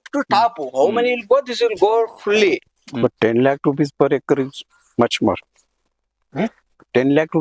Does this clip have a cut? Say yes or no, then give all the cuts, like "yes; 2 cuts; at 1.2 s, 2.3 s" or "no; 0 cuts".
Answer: yes; 1 cut; at 2.7 s